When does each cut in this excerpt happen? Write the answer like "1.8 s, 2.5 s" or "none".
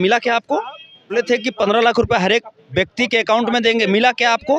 1.1 s